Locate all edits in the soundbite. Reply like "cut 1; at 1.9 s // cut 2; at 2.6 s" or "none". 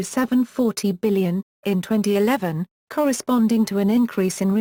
none